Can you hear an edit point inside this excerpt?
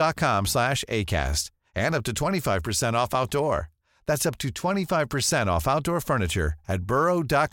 no; 0 cuts

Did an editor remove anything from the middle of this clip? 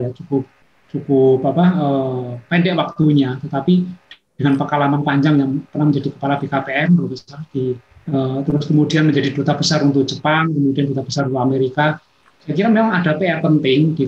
no; 0 cuts

